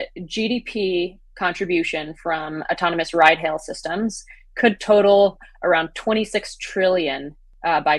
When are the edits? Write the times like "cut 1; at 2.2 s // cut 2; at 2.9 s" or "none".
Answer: none